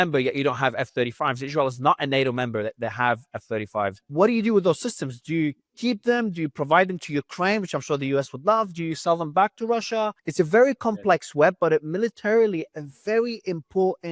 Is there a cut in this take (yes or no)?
yes